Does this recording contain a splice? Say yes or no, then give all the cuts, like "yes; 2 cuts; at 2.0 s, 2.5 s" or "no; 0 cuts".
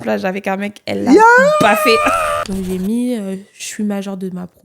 yes; 1 cut; at 2.4 s